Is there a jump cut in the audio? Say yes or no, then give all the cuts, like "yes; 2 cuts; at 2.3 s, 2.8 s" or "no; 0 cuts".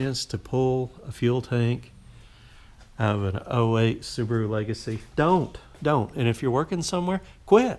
no; 0 cuts